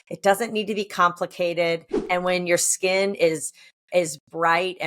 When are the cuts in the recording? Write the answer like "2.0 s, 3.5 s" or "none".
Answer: 2.0 s